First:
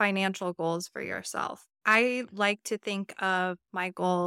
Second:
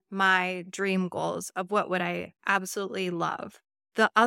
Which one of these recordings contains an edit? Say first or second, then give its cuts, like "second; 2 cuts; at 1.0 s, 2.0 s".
first; 1 cut; at 1.7 s